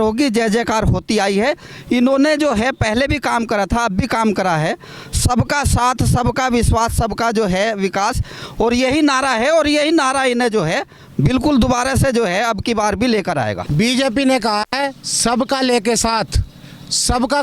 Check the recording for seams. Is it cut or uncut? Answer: cut